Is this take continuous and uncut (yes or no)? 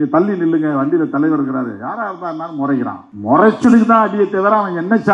no